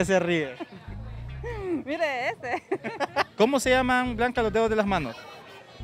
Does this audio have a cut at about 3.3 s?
yes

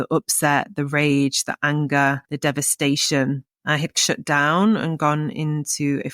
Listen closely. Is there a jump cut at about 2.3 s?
yes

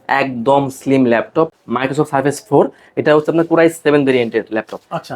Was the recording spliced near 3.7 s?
no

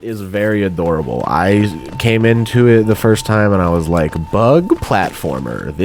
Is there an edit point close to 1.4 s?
no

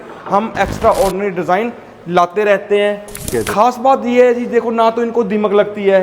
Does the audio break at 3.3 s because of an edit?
yes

